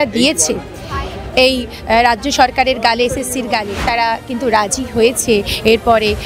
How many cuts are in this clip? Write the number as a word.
one